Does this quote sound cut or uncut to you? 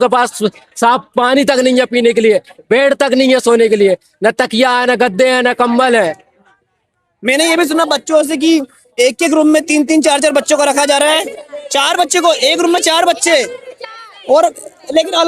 uncut